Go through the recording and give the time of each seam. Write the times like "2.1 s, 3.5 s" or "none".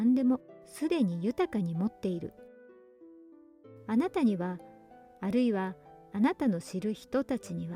none